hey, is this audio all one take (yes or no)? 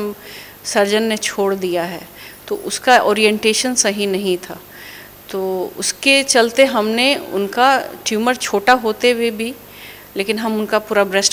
yes